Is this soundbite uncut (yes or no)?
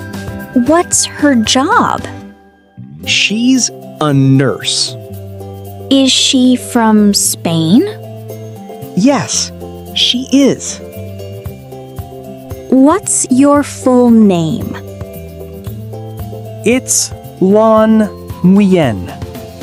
yes